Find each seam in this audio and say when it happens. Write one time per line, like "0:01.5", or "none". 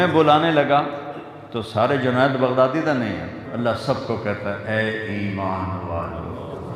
0:03.4

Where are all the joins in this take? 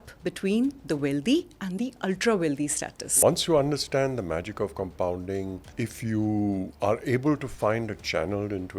0:03.0
0:05.6
0:06.7

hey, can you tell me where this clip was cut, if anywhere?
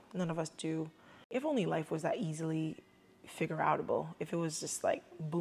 0:01.3

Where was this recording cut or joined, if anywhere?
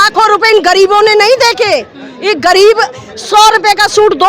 none

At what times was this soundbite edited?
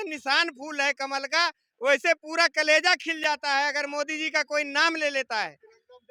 none

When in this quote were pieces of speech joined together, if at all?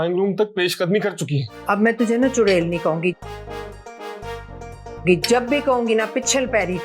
0:01.5

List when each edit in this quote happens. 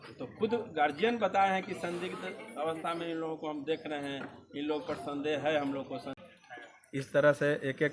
0:06.1

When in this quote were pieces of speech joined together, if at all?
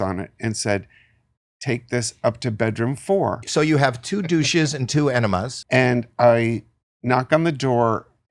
0:03.5
0:05.5

